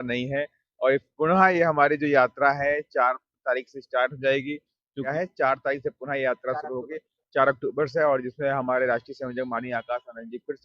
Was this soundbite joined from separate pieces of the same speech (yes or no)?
yes